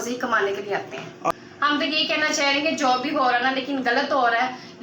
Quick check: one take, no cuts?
no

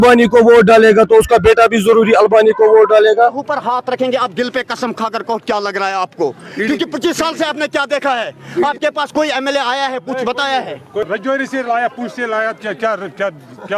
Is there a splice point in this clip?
yes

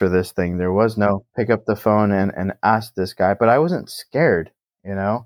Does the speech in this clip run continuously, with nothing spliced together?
no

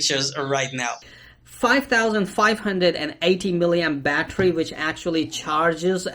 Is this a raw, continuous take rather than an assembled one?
no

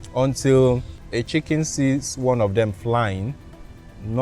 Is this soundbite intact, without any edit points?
no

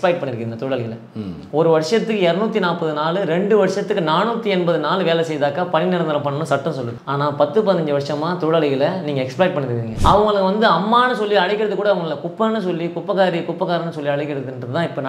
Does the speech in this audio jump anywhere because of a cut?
yes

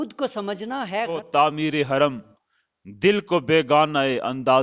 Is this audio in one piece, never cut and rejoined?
no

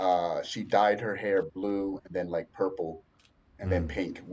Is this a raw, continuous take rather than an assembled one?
yes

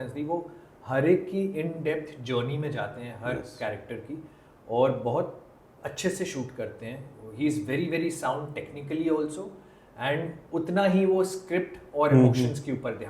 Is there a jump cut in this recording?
no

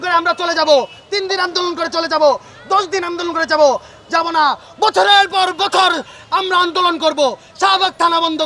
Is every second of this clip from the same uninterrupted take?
yes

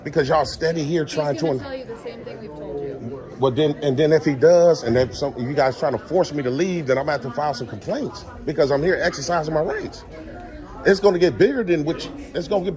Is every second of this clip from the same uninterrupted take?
yes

